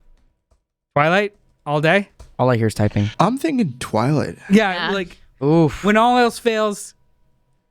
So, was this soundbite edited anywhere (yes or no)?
yes